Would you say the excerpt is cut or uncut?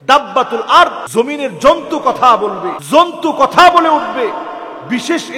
cut